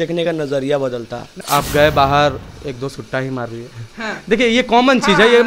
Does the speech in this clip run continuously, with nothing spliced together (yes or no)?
no